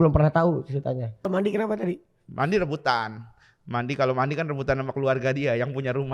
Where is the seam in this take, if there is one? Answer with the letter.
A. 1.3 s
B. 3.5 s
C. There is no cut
A